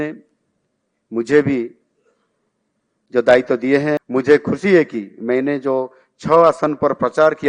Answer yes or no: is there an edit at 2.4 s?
no